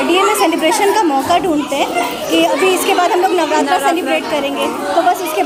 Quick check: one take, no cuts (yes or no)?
yes